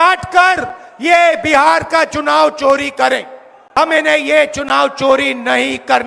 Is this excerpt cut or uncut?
cut